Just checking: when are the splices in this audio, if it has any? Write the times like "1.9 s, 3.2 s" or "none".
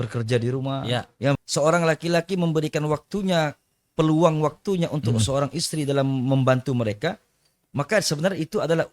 1.4 s